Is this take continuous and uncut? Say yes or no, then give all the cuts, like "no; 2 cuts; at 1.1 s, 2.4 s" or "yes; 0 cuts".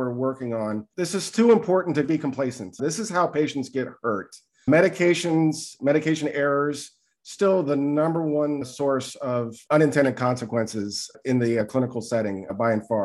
yes; 0 cuts